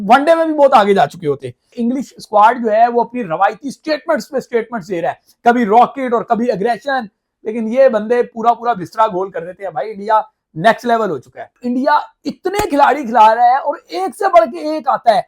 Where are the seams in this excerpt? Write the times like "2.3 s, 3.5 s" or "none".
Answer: 1.7 s, 11.5 s